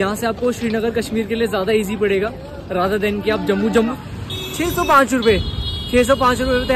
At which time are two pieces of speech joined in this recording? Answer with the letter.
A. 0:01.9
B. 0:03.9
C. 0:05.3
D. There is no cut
B